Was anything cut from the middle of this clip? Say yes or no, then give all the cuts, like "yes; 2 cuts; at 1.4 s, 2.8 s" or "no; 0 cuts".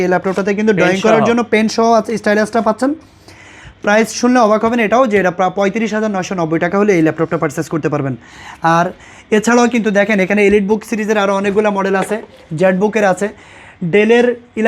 no; 0 cuts